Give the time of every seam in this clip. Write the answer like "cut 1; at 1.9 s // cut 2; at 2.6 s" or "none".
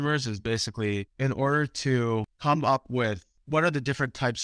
none